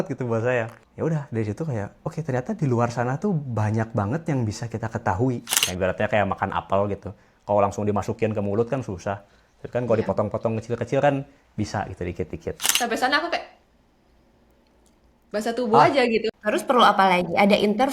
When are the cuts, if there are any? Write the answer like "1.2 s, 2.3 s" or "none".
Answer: 5.6 s, 12.7 s, 16.3 s